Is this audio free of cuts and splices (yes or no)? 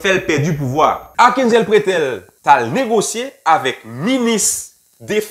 no